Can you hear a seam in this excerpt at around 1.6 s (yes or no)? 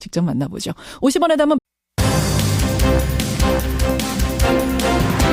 no